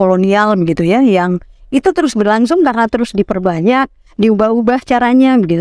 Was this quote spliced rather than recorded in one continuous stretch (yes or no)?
no